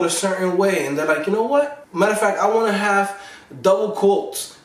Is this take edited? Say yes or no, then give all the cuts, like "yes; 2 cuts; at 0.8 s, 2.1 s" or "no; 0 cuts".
yes; 1 cut; at 1.8 s